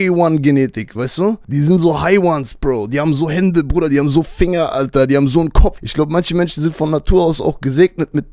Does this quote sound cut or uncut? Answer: cut